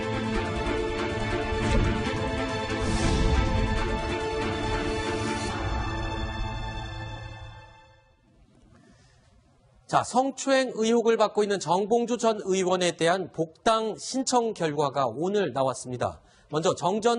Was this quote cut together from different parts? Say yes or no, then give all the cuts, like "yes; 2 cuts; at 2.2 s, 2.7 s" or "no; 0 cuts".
yes; 1 cut; at 6.1 s